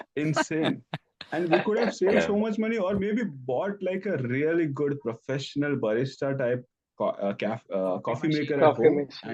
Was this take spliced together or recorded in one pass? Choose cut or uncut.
uncut